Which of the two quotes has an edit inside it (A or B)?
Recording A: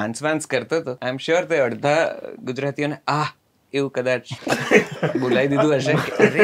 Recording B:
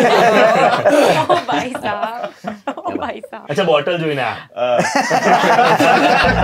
A